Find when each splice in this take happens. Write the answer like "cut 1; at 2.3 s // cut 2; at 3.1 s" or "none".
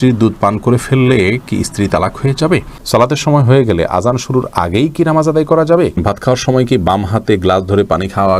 cut 1; at 2.7 s // cut 2; at 6.0 s